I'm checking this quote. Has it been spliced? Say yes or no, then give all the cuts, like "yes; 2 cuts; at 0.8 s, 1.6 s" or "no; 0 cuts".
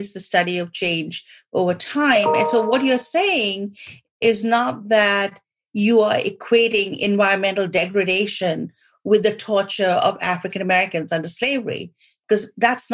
no; 0 cuts